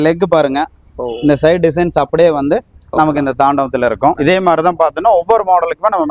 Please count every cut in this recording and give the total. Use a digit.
1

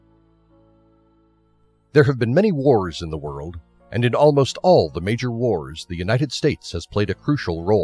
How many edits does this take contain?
0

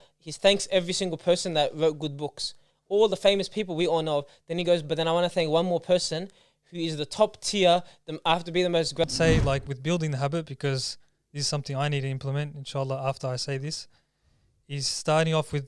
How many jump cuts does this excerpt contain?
1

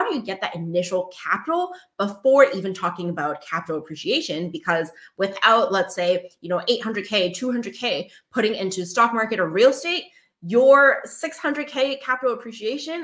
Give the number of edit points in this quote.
0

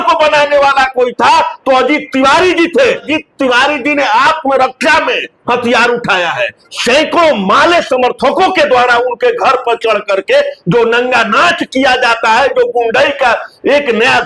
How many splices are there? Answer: 2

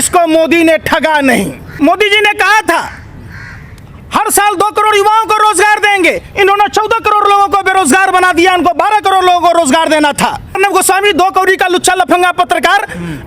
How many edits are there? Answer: 2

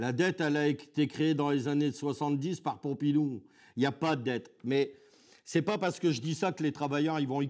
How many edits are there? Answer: 0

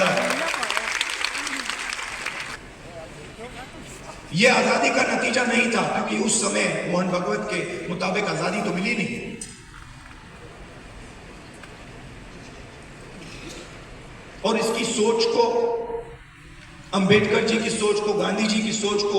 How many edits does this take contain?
1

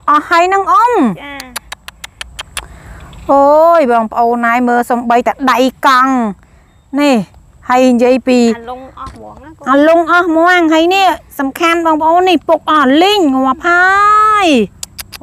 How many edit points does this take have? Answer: 0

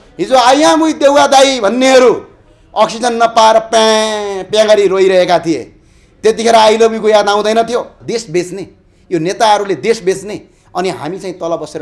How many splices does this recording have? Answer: 1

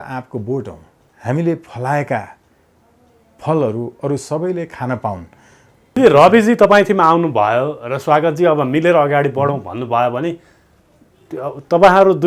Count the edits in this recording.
1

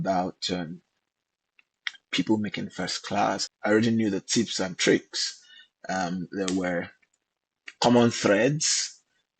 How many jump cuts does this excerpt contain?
1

